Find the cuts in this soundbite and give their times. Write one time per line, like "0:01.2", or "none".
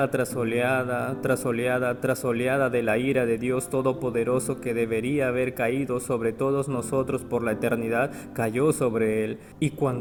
none